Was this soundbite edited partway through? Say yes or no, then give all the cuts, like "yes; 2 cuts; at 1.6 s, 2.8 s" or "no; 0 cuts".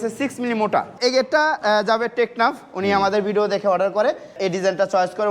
yes; 2 cuts; at 0.9 s, 4.4 s